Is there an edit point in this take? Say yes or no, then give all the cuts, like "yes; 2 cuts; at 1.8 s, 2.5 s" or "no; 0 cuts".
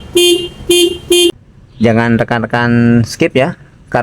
yes; 1 cut; at 1.7 s